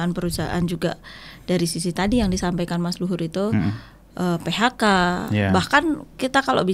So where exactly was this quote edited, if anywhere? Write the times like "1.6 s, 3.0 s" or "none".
none